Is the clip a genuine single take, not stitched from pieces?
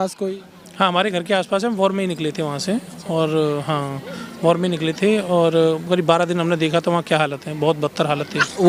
yes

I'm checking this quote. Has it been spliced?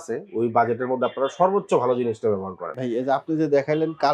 no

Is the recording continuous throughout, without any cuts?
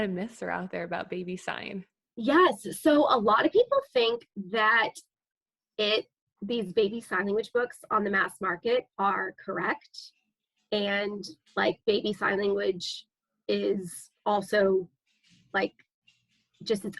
yes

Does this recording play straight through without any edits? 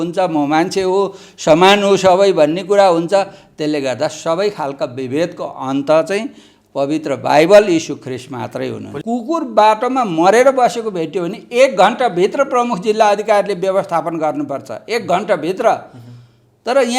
no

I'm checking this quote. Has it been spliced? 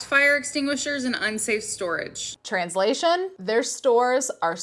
yes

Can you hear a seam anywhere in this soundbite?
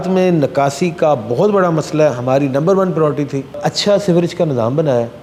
no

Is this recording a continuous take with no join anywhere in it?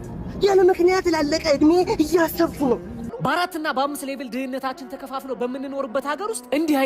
no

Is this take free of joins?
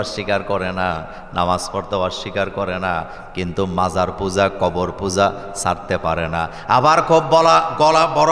yes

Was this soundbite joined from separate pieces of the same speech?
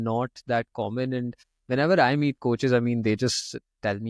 no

